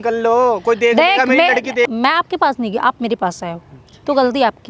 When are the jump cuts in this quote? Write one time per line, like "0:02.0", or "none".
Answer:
0:01.9